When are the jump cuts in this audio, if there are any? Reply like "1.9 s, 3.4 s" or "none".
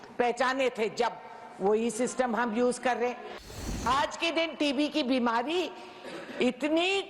3.6 s